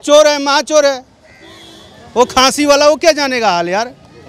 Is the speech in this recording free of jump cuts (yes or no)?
yes